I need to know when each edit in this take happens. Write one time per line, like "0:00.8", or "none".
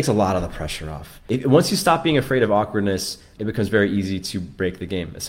0:01.1
0:03.3